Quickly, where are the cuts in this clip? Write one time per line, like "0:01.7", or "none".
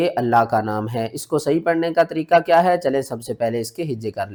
none